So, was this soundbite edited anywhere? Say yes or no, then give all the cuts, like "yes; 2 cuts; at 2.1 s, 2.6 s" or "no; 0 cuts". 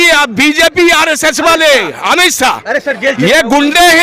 no; 0 cuts